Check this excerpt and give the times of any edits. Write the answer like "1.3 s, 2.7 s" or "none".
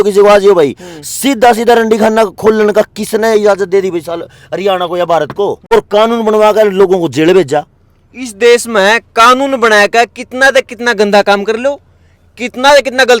5.7 s